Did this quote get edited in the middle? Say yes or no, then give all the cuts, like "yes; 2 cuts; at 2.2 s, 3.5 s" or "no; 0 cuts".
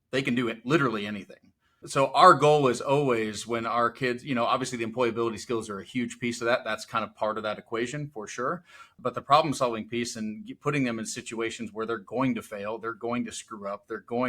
yes; 1 cut; at 8.9 s